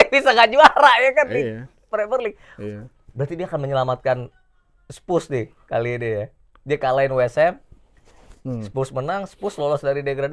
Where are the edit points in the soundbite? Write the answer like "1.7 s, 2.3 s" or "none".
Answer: none